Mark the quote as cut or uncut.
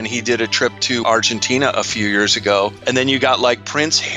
cut